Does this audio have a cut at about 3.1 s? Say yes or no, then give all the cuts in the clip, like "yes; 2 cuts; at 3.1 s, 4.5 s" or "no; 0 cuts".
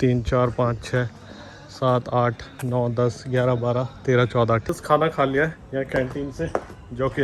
no; 1 cut; at 4.7 s